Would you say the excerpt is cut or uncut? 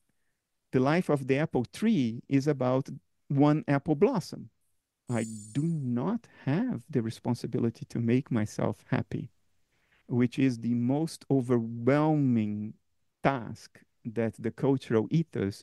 cut